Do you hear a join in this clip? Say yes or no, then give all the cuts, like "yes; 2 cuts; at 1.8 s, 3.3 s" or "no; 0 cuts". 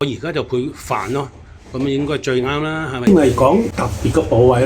yes; 1 cut; at 3.1 s